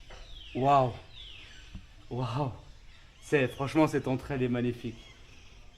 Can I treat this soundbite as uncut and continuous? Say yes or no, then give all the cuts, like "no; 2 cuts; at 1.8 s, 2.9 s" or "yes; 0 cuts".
yes; 0 cuts